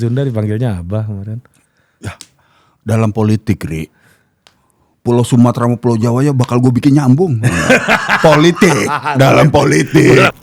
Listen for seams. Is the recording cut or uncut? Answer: uncut